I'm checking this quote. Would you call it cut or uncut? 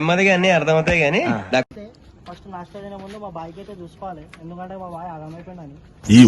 cut